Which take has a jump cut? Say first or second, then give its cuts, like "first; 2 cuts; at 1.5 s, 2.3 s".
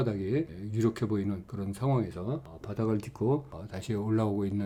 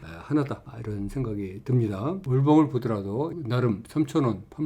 second; 2 cuts; at 2.2 s, 3.4 s